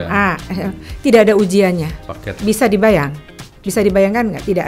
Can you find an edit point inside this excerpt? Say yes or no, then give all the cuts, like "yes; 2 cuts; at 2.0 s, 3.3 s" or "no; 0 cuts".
no; 0 cuts